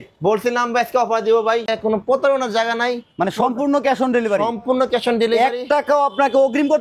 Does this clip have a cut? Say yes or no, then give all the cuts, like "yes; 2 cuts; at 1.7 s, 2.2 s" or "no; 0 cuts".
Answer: yes; 1 cut; at 1.7 s